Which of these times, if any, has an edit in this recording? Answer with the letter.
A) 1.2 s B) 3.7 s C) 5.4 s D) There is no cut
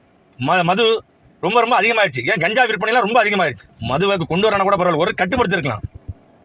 B